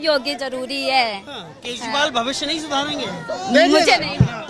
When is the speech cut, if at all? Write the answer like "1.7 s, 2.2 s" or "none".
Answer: none